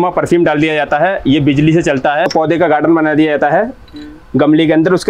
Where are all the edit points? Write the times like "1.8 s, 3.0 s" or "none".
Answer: 2.3 s

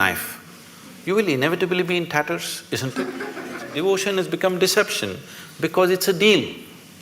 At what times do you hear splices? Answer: 3.6 s

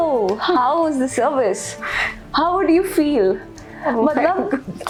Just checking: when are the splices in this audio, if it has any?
none

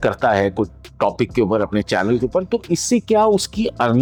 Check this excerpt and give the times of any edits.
none

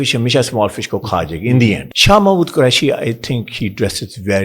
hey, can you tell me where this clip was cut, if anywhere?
1.9 s

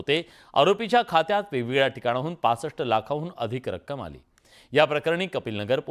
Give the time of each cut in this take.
none

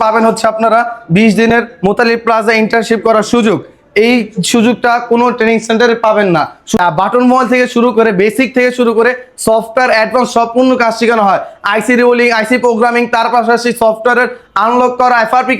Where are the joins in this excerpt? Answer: 6.8 s

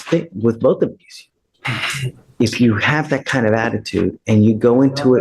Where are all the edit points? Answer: 1.9 s

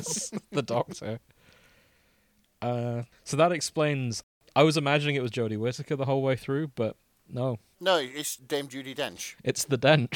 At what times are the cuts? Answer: 3.2 s, 4.2 s, 7.7 s

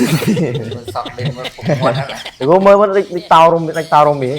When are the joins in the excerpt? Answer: 2.2 s

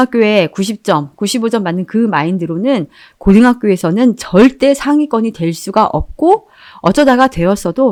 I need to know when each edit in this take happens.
none

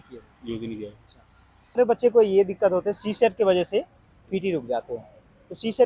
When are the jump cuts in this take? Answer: 1.8 s

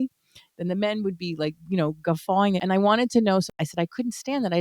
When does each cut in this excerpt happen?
2.6 s, 3.5 s

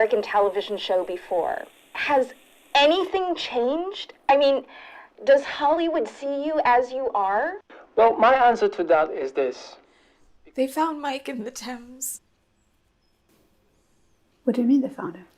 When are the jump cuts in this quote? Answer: 1.6 s

